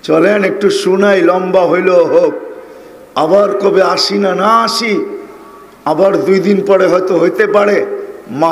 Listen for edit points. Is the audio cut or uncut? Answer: uncut